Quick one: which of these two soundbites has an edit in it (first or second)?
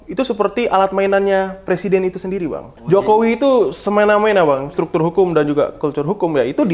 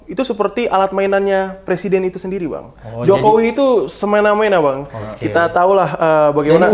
first